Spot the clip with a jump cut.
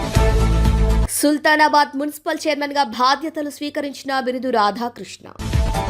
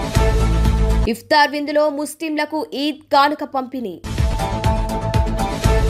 first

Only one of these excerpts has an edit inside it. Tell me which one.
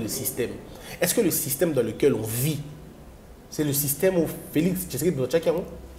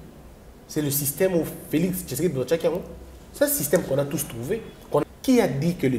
second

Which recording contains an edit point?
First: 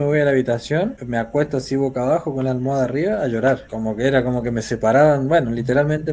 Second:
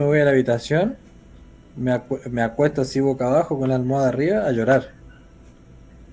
first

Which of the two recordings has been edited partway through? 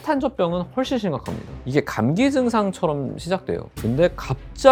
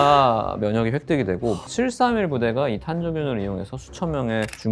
second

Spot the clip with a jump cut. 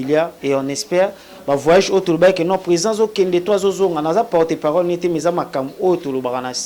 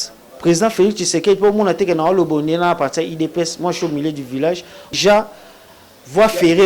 second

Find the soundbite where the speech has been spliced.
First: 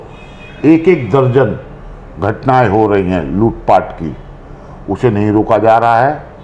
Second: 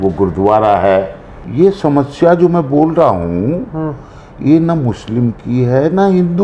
second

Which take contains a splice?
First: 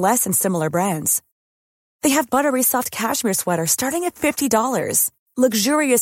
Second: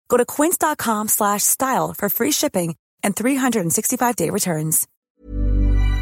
second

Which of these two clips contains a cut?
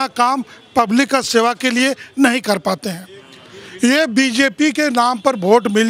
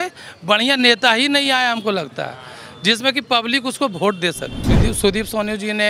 second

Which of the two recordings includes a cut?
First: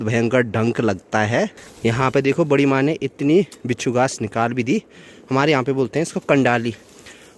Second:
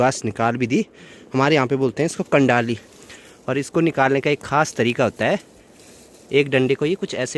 first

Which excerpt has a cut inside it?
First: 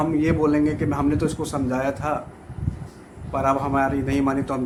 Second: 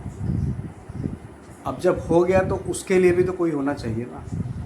second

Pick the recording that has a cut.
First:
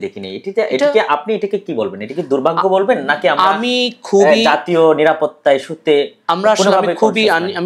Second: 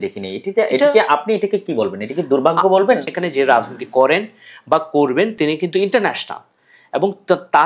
second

